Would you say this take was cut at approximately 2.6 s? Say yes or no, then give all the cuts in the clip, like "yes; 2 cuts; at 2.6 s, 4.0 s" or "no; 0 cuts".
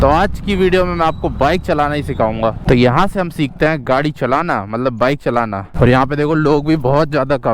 yes; 2 cuts; at 2.6 s, 5.6 s